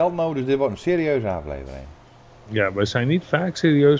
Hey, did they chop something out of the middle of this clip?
no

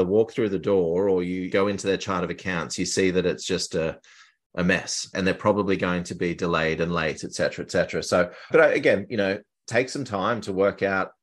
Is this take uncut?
yes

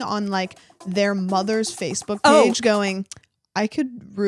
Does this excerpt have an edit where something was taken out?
no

